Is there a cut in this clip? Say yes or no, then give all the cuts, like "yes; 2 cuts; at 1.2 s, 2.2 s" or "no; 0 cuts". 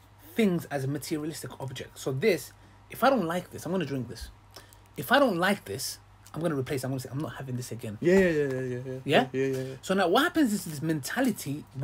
no; 0 cuts